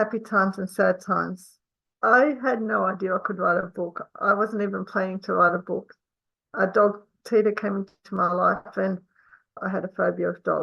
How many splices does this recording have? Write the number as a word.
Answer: two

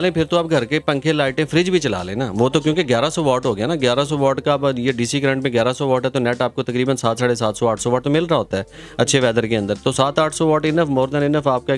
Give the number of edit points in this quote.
zero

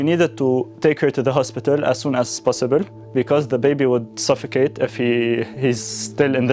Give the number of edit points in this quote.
zero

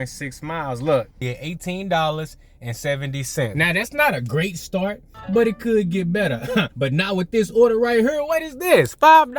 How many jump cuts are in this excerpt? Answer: three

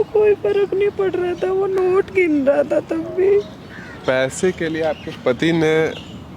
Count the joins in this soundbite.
one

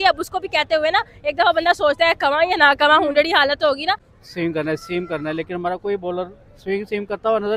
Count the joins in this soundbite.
one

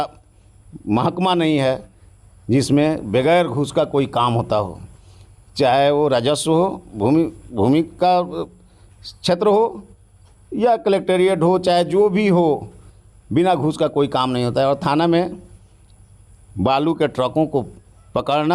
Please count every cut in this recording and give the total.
zero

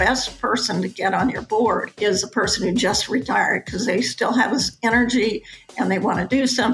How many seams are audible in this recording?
one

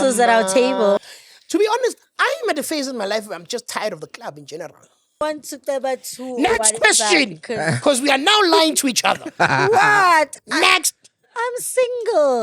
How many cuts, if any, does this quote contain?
two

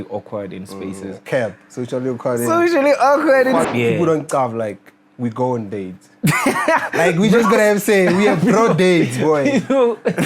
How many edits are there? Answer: one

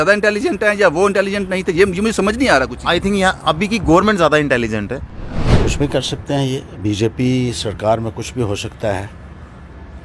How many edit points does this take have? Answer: one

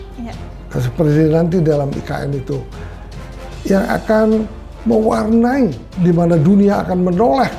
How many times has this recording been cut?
one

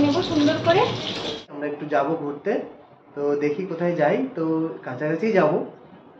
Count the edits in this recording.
one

